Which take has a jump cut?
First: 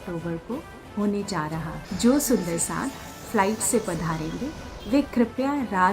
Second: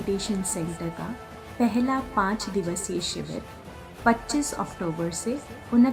first; 1 cut; at 1.8 s

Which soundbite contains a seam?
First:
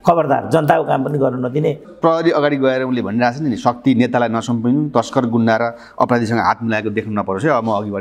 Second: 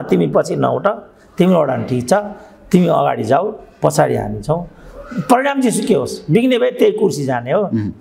first; 1 cut; at 1.9 s

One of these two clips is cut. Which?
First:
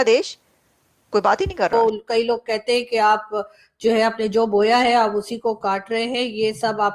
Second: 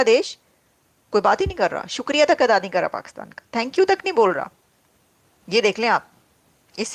first; 1 cut; at 1.7 s

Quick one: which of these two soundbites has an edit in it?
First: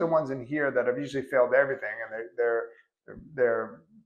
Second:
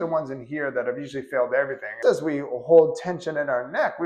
second; 1 cut; at 1.9 s

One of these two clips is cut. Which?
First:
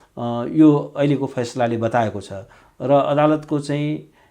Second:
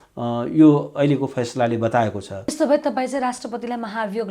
second; 1 cut; at 2.5 s

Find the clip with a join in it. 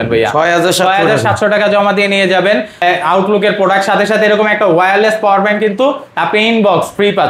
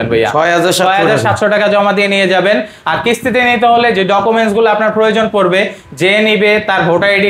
first; 1 cut; at 2.7 s

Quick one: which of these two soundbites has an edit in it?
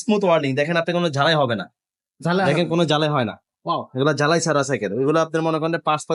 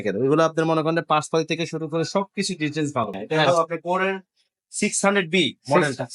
second; 1 cut; at 3.2 s

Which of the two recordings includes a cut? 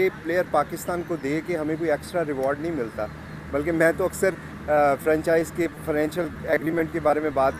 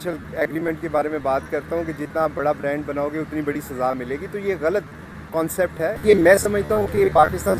second; 1 cut; at 6.0 s

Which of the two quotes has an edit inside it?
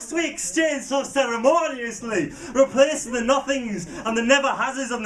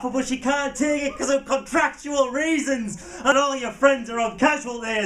second; 1 cut; at 3.3 s

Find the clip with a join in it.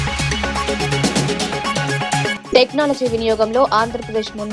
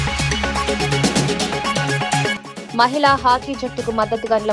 second; 1 cut; at 2.4 s

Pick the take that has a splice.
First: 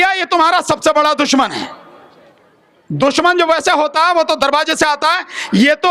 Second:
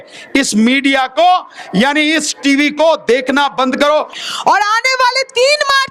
second; 1 cut; at 4.2 s

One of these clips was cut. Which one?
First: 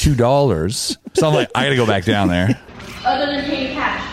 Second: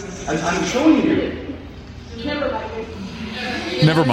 first; 2 cuts; at 1.1 s, 2.7 s

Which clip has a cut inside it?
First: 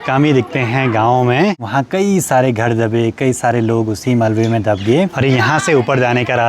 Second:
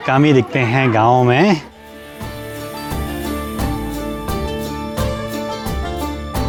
first; 2 cuts; at 1.6 s, 5.1 s

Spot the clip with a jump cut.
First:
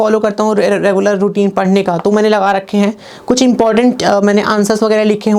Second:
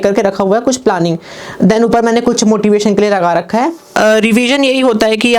second; 1 cut; at 3.9 s

